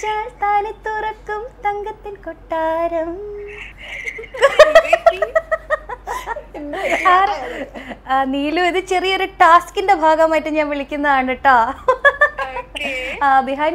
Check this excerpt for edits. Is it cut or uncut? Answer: uncut